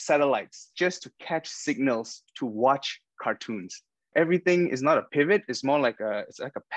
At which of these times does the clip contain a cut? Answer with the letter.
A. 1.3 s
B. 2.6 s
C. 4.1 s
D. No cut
C